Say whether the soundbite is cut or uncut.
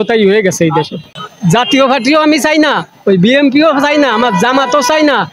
cut